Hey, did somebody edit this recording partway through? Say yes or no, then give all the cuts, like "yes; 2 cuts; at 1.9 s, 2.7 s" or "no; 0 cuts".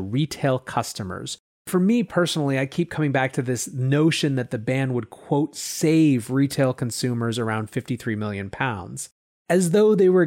yes; 1 cut; at 1.7 s